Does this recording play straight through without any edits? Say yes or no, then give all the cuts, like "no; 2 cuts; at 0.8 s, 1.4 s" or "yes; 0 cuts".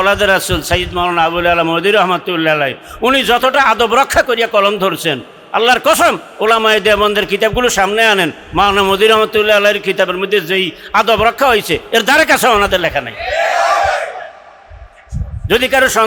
yes; 0 cuts